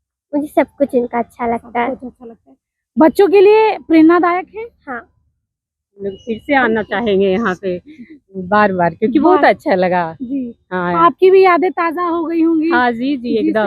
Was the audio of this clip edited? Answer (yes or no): no